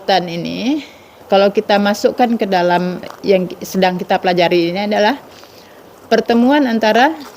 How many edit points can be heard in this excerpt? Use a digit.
2